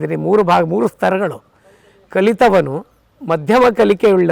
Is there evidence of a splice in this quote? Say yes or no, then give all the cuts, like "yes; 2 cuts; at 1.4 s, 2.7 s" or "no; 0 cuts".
no; 0 cuts